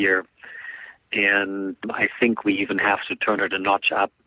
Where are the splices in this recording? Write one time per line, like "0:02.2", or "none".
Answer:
0:01.8